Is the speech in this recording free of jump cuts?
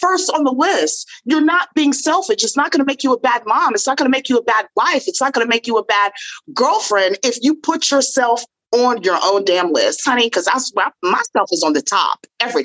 yes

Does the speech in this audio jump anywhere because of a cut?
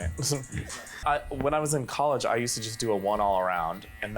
yes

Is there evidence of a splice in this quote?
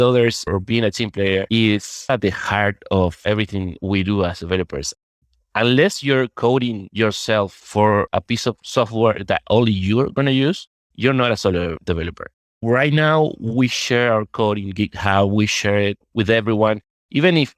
yes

